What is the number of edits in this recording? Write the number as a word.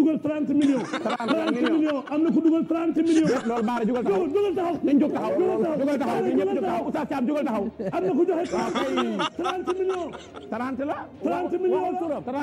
two